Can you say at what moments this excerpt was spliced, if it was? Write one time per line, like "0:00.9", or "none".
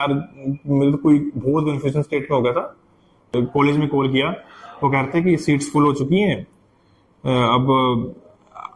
0:03.3